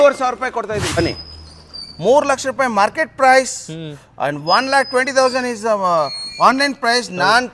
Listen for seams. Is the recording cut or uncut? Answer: cut